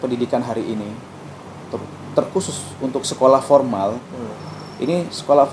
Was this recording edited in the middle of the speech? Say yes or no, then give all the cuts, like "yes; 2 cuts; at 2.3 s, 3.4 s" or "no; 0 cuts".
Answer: no; 0 cuts